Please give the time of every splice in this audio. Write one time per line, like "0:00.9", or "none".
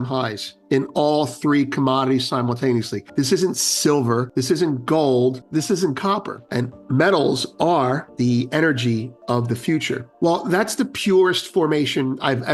0:03.0
0:04.3
0:05.4
0:06.4
0:08.1
0:10.1